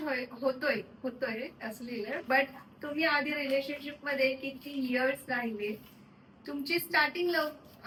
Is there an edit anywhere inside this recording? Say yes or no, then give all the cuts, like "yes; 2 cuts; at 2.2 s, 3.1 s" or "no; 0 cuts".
no; 0 cuts